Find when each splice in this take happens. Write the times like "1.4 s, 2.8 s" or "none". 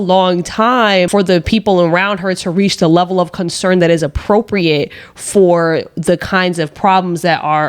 1.1 s